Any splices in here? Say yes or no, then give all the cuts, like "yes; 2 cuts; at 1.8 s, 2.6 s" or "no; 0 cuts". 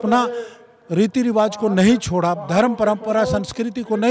no; 0 cuts